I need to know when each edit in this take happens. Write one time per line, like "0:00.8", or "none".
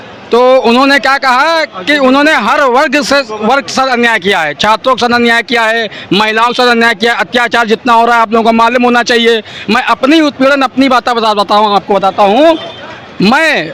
none